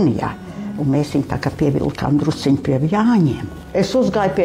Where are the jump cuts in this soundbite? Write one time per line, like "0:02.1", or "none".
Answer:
0:03.5